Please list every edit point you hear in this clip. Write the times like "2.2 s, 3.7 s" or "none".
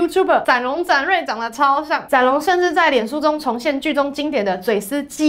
none